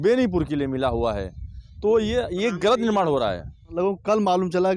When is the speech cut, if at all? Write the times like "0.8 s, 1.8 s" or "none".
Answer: 3.6 s